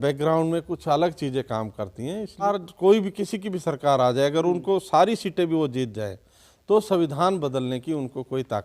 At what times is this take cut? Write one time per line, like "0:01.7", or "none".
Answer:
0:02.4